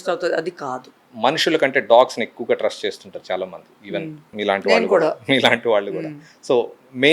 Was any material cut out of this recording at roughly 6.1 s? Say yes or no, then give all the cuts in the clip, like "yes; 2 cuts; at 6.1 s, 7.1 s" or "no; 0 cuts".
no; 2 cuts; at 1.0 s, 4.2 s